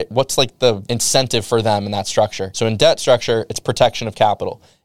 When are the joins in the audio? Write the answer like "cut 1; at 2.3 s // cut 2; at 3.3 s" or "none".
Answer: none